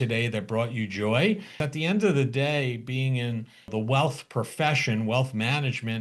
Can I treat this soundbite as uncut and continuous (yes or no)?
no